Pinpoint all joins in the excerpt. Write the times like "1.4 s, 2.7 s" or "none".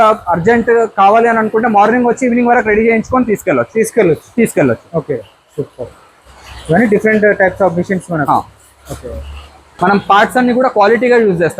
none

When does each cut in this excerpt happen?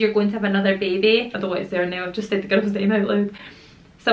1.3 s

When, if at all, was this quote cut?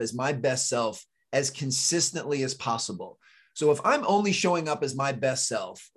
none

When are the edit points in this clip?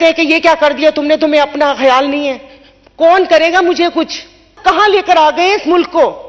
4.5 s

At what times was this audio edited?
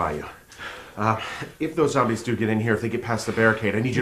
1.9 s

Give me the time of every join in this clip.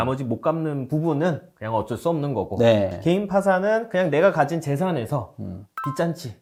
none

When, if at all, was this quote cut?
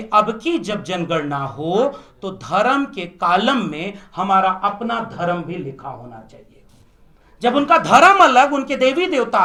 none

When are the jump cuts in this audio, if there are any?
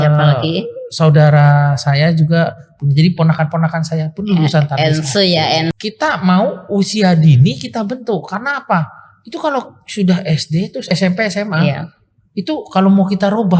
5.7 s, 10.9 s

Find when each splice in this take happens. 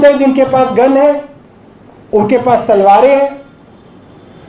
none

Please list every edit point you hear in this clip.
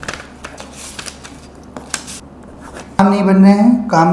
2.2 s

